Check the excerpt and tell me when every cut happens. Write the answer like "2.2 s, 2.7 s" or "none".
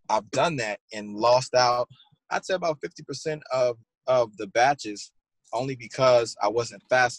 3.9 s